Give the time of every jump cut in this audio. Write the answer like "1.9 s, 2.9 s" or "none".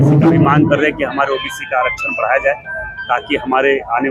none